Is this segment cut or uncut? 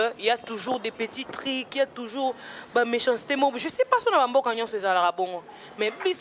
uncut